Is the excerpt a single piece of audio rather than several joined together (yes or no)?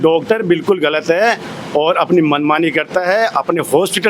yes